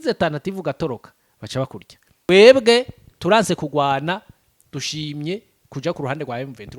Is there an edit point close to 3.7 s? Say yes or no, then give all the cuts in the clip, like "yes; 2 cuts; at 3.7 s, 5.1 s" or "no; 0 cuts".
no; 1 cut; at 2.3 s